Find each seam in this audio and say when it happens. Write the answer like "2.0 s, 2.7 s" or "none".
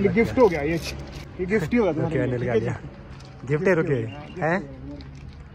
1.1 s